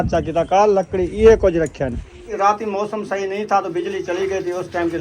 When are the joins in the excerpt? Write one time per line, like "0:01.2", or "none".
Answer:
0:02.3